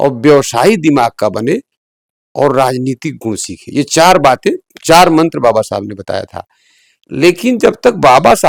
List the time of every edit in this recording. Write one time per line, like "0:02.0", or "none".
none

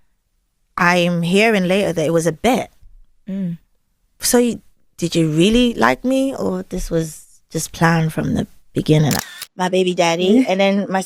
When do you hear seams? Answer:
0:09.2

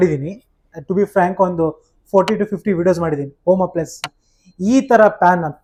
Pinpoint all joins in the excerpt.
none

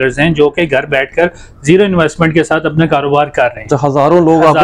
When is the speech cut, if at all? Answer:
none

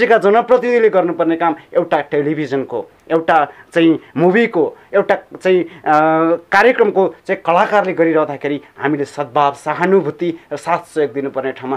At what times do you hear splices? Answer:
none

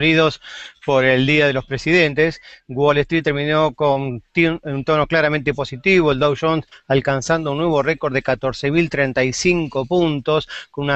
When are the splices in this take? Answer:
0:07.8

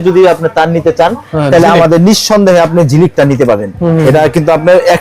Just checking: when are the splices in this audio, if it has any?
none

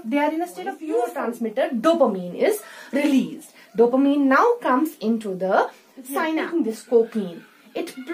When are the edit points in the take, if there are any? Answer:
0:01.1
0:06.2

